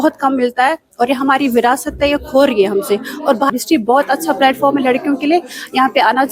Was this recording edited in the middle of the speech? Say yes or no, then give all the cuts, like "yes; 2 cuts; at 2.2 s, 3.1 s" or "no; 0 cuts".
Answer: yes; 1 cut; at 3.5 s